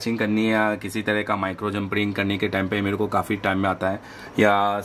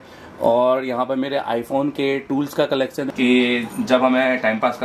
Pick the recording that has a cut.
second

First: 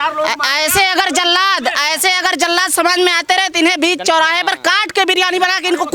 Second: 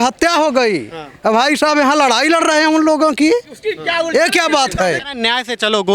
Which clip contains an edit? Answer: second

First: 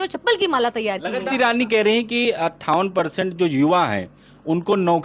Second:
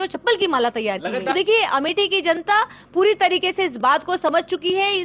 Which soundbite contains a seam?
second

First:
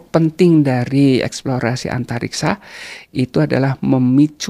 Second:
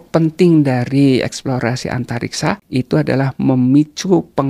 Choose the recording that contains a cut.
second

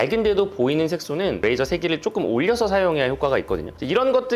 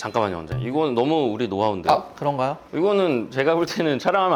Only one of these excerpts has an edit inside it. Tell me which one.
first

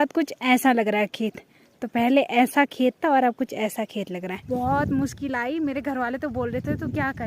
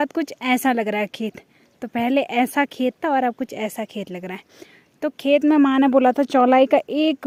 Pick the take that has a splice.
first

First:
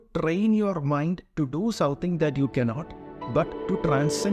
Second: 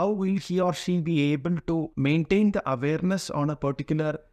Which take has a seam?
second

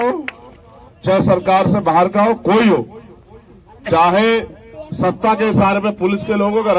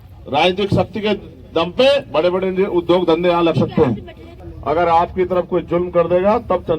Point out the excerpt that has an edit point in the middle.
second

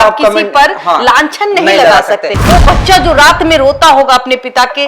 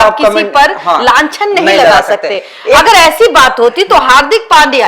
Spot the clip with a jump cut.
first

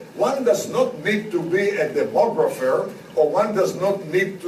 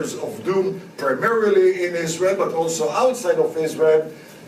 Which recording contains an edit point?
second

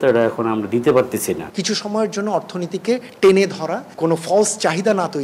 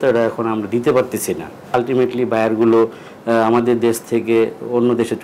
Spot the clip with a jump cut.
first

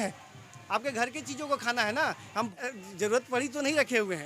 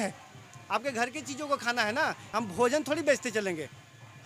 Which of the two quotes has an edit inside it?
first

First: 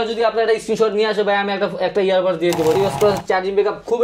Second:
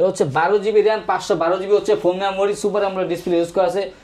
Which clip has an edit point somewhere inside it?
first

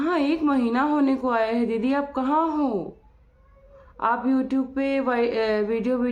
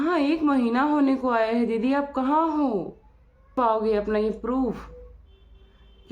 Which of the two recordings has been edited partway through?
second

